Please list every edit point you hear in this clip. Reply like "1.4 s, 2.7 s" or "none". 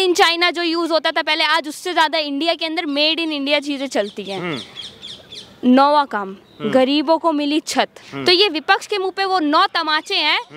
8.1 s